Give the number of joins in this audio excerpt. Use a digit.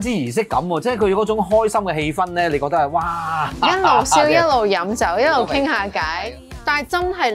1